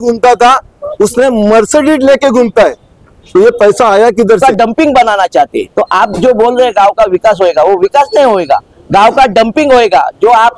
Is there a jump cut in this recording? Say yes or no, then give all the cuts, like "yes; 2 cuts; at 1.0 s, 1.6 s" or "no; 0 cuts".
yes; 1 cut; at 4.4 s